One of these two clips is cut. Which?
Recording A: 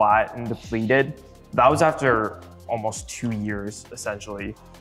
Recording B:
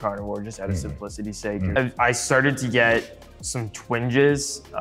B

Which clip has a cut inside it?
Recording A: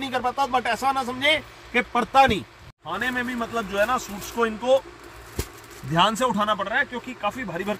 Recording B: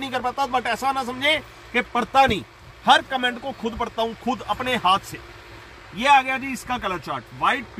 A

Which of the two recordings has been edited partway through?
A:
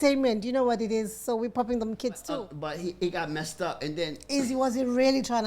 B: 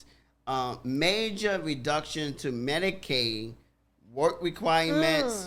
A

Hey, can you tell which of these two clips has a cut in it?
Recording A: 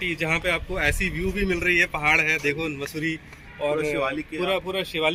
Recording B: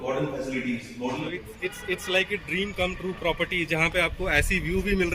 B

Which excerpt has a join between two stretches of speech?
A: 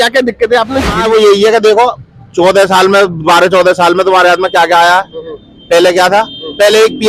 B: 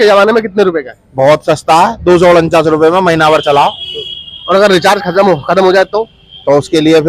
A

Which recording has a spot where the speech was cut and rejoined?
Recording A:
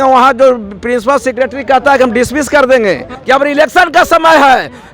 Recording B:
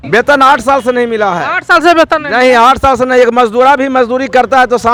A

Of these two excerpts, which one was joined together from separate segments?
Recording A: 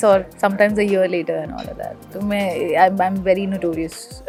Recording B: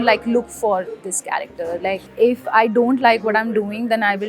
B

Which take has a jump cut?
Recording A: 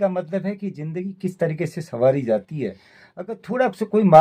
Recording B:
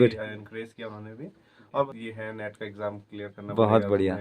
B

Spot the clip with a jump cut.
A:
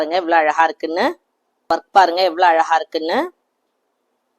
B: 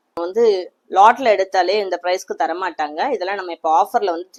A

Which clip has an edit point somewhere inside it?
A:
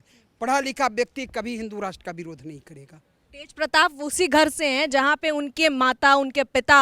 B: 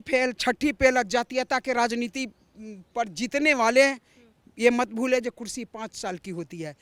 A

